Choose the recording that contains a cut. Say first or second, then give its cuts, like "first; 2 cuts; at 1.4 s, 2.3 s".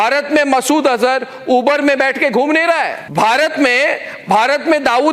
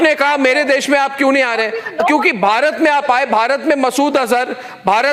first; 1 cut; at 3.0 s